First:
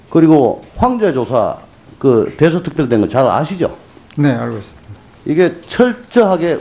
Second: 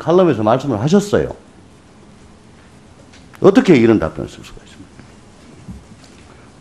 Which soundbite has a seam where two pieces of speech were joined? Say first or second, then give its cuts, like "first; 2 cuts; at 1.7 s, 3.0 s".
first; 1 cut; at 3.8 s